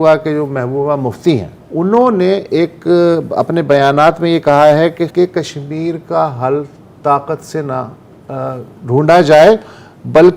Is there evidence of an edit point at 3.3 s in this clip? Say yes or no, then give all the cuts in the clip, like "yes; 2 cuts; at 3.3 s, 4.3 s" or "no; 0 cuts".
no; 2 cuts; at 1.6 s, 5.1 s